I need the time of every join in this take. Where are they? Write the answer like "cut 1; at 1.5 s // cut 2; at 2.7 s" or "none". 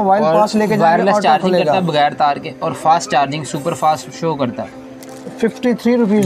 cut 1; at 5.0 s